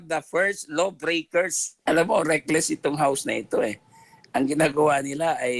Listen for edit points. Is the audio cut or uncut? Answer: cut